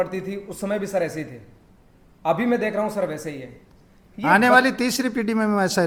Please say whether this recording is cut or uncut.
uncut